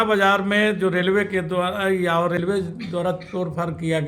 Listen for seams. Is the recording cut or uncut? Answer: cut